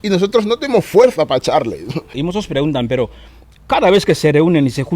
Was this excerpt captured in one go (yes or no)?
no